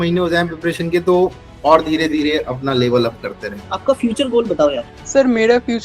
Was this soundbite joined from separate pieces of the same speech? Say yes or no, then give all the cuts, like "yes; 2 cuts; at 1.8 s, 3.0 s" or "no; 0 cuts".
yes; 2 cuts; at 3.6 s, 4.9 s